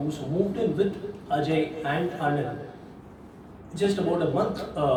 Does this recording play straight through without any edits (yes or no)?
yes